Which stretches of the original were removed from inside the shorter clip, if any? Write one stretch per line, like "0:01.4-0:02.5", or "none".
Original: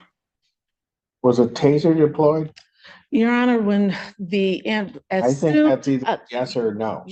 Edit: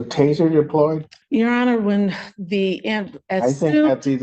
0:02.6-0:02.9